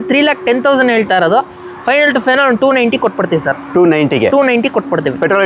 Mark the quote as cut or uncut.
uncut